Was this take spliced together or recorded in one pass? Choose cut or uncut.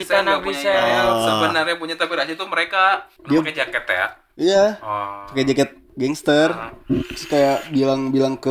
cut